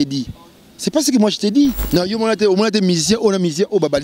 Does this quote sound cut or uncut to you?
cut